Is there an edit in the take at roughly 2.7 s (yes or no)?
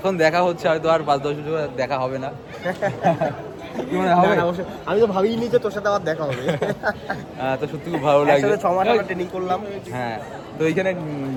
no